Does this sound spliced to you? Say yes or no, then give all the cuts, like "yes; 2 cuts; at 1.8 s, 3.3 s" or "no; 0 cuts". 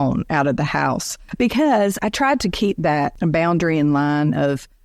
yes; 3 cuts; at 1.2 s, 2.0 s, 3.1 s